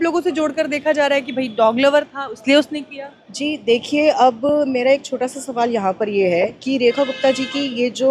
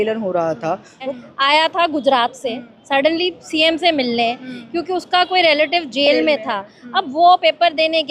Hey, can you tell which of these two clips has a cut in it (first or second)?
second